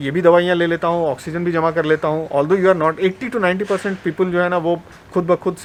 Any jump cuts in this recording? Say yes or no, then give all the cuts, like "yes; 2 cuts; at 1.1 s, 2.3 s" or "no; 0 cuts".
no; 0 cuts